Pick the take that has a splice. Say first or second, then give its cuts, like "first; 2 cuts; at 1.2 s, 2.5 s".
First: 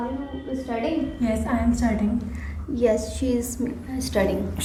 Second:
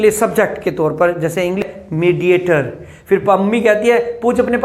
second; 1 cut; at 1.7 s